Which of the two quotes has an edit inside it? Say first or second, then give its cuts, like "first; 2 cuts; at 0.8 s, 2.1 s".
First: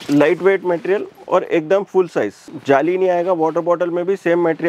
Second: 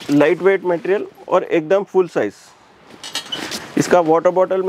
first; 1 cut; at 2.5 s